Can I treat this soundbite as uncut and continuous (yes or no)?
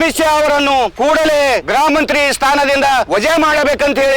no